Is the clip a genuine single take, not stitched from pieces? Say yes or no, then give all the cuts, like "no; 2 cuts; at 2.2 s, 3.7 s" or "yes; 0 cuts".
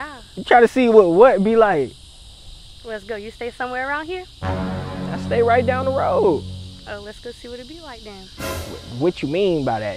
yes; 0 cuts